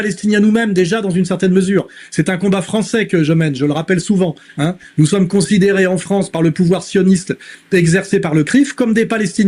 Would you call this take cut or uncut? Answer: uncut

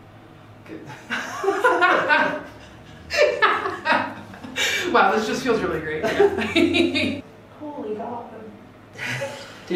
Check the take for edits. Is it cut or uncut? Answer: cut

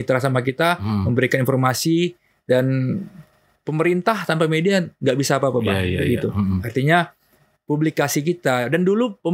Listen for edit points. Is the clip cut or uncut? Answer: uncut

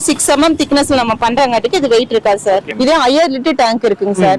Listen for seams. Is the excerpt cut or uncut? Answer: cut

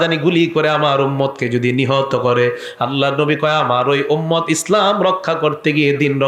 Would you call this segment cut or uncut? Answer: uncut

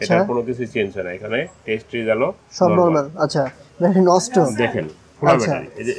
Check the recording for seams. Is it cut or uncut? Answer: cut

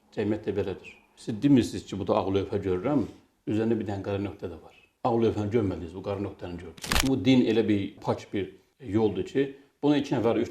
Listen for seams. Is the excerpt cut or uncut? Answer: cut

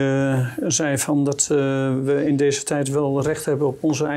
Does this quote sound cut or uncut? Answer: uncut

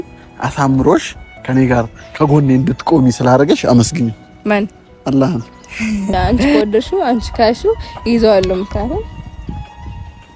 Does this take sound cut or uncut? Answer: cut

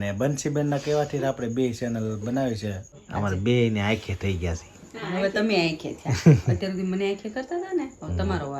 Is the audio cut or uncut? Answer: cut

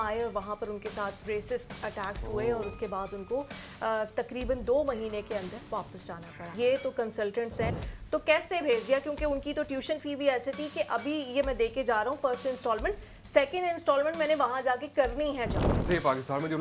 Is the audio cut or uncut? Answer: cut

